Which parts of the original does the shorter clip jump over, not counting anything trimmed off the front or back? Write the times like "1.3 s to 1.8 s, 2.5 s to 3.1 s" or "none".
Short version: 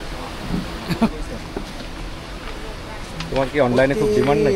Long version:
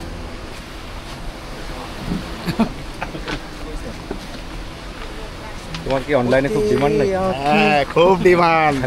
2.7 s to 3.6 s